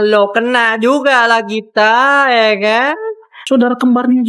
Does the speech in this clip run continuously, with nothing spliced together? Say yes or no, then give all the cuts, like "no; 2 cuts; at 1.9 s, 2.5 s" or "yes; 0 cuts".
no; 1 cut; at 3.3 s